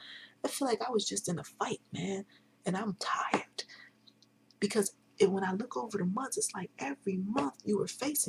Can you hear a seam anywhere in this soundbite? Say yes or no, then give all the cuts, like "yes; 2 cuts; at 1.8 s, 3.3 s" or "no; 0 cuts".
no; 0 cuts